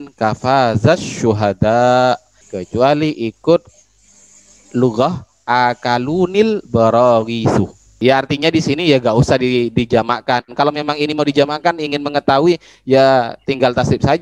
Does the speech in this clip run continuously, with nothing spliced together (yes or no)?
no